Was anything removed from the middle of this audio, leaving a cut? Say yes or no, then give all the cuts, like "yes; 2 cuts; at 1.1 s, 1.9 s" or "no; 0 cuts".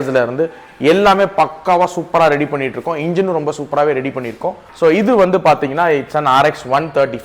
yes; 1 cut; at 4.6 s